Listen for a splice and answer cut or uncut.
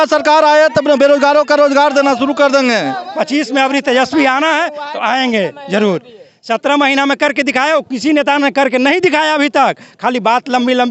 cut